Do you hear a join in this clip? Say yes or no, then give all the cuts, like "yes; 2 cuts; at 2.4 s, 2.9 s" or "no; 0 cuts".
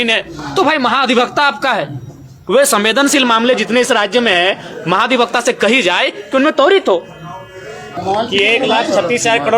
yes; 1 cut; at 8.0 s